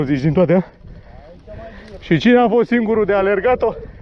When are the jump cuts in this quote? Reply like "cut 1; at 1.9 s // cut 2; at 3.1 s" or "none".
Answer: cut 1; at 2.0 s